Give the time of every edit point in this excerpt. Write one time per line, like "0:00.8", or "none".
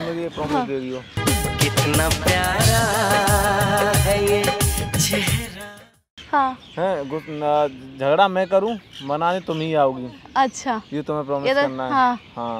none